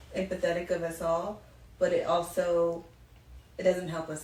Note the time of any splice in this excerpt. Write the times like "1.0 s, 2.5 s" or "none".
none